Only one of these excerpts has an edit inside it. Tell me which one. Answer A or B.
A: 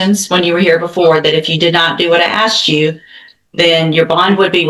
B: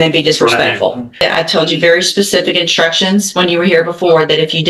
B